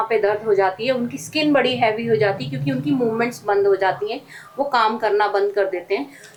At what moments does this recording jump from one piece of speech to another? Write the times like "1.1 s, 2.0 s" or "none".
none